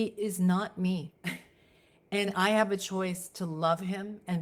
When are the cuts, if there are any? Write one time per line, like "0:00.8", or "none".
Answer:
none